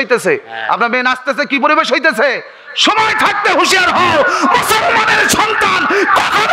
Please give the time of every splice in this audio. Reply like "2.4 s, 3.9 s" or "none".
none